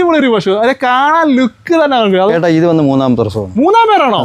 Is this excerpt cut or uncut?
cut